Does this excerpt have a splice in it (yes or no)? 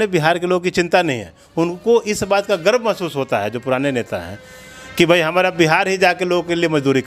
no